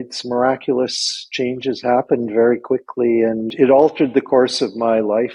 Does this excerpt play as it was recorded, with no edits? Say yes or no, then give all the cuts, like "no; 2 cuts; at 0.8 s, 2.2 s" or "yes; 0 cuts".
no; 1 cut; at 3.5 s